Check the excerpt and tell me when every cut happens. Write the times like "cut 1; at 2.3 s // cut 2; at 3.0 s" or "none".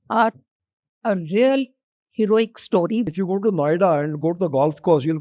cut 1; at 3.1 s